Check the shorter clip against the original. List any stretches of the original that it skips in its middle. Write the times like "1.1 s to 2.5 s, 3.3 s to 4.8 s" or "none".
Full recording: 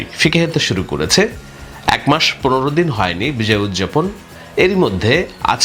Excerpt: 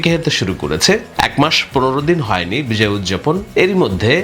1.4 s to 1.8 s, 4.1 s to 4.5 s